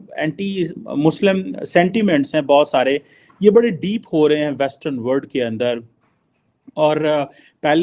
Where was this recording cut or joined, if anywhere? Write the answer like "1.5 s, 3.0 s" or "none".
none